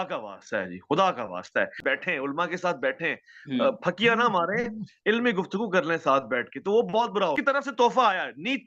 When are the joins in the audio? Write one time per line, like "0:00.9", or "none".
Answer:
0:01.8
0:07.4